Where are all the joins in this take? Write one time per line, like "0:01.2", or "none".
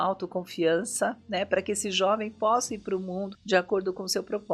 0:03.3